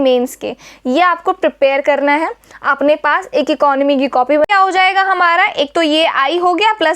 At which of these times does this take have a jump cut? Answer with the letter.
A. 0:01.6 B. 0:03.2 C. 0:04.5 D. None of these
C